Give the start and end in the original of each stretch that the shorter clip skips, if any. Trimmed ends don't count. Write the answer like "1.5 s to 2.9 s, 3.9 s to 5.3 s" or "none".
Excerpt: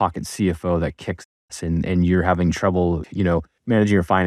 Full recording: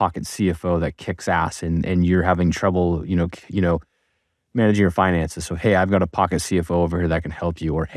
3.0 s to 3.9 s